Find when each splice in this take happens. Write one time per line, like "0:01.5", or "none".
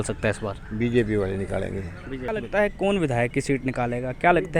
0:02.3